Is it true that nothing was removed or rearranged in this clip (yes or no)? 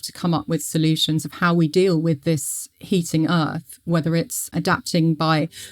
no